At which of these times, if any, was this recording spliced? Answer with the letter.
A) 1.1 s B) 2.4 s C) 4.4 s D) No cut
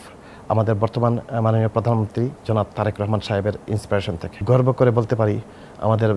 C